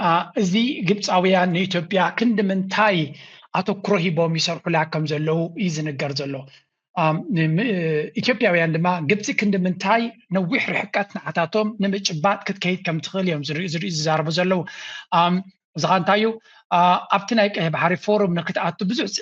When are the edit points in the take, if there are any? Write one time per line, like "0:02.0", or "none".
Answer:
none